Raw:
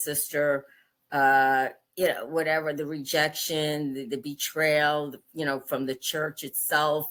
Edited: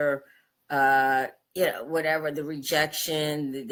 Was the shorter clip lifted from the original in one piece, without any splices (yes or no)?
yes